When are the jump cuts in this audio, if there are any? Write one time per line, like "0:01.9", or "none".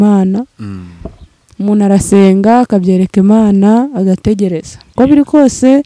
0:04.8

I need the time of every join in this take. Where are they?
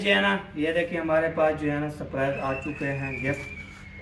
none

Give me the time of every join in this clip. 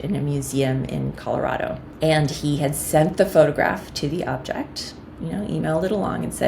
0:01.9

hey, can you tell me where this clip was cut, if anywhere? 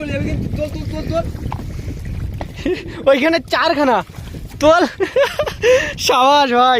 none

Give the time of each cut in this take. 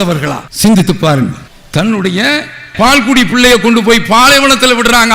0:01.4

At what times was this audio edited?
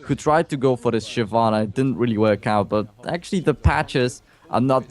0:01.8

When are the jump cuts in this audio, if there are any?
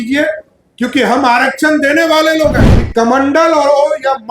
0:02.7

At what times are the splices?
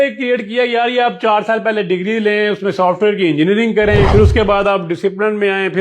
0:04.1

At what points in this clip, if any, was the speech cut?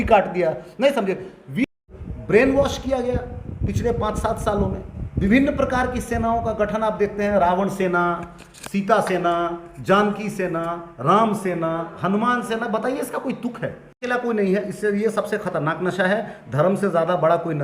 0:01.7
0:14.1

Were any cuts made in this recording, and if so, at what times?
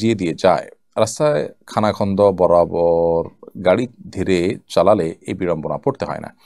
none

